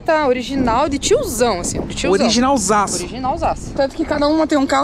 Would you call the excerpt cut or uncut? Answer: cut